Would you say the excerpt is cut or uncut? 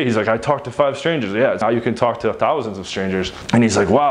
cut